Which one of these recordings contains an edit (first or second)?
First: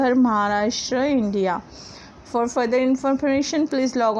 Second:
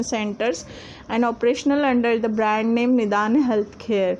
second